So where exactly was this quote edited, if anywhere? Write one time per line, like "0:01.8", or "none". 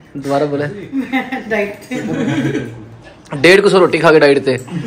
none